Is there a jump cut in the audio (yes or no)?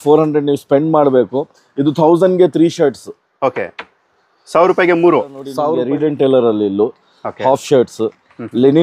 yes